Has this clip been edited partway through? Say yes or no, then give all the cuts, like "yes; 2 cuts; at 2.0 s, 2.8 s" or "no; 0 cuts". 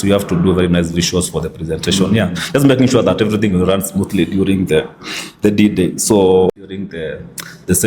yes; 1 cut; at 6.5 s